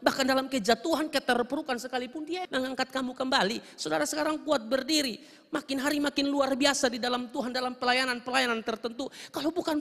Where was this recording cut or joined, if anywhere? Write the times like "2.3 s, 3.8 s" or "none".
2.4 s